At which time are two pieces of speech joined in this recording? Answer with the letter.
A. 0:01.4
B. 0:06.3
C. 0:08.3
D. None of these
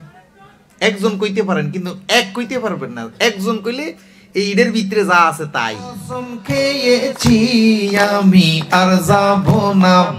B